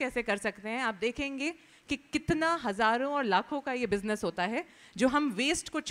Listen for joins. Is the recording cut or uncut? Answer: uncut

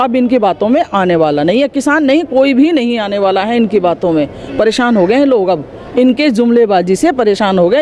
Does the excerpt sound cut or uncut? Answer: uncut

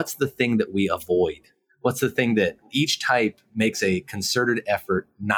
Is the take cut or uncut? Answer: uncut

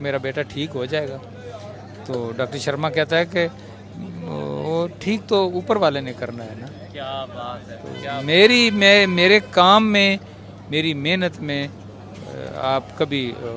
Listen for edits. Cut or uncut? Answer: uncut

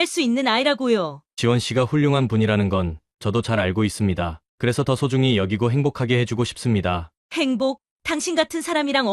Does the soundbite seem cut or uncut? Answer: cut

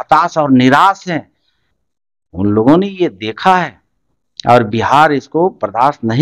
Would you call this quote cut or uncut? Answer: uncut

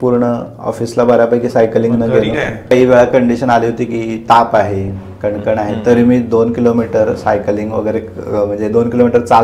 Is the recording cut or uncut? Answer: cut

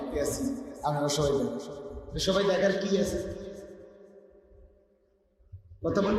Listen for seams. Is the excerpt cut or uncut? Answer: uncut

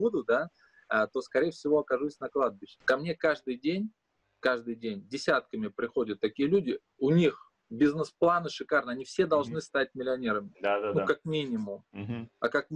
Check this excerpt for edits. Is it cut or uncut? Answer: cut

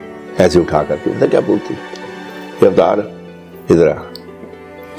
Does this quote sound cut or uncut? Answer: cut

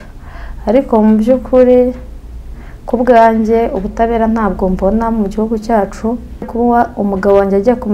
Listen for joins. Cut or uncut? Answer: cut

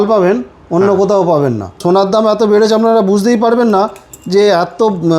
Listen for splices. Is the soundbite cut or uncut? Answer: cut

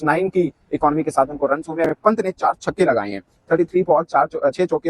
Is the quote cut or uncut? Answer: cut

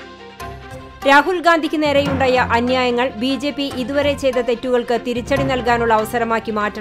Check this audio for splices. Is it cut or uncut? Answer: uncut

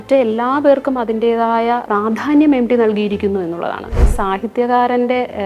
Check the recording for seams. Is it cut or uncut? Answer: cut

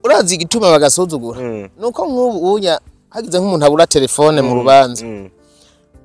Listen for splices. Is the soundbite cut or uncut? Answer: uncut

